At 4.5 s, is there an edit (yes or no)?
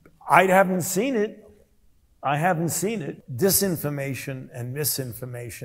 no